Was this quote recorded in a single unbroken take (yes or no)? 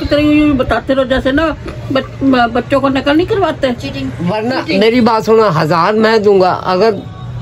yes